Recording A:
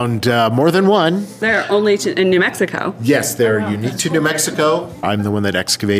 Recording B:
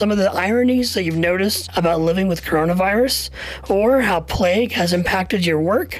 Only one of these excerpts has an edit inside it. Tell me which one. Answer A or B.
A